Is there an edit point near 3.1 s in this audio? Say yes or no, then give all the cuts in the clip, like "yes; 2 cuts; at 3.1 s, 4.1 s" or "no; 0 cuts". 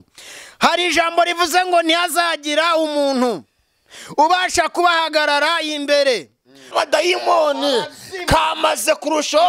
no; 1 cut; at 6.7 s